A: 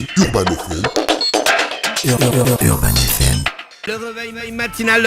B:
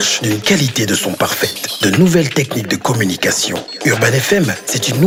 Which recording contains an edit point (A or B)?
A